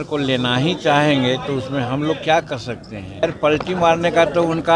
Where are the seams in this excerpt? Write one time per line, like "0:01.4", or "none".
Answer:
0:03.2